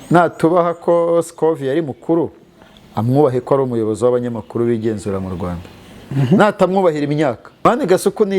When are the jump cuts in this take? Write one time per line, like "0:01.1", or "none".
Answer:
0:07.5